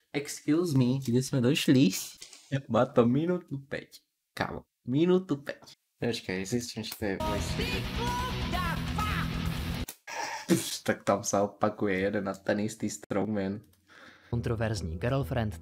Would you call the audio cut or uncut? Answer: cut